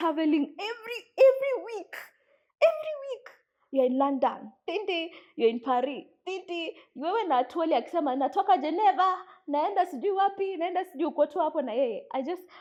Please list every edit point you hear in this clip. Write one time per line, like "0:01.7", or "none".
none